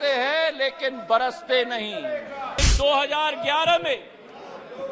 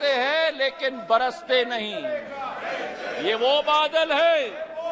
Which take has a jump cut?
first; 1 cut; at 2.6 s

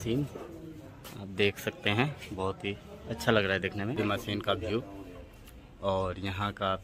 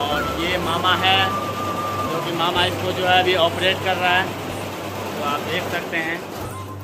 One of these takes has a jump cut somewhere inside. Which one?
first; 1 cut; at 4.0 s

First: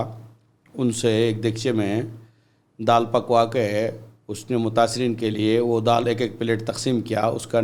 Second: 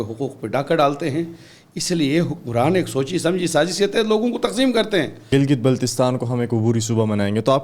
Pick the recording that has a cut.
second; 1 cut; at 5.3 s

